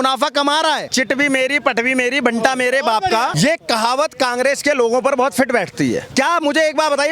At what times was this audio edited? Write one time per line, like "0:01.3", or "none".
0:00.9
0:03.3
0:06.1

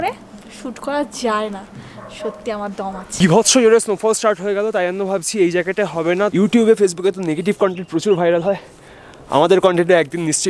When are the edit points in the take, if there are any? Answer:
0:03.1
0:06.3

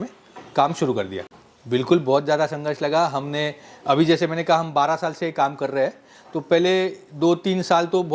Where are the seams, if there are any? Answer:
0:01.2

